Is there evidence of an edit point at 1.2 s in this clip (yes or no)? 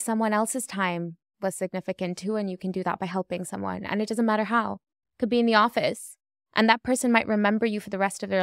no